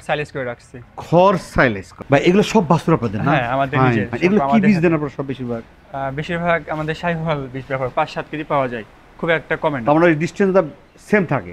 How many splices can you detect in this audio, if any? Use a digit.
2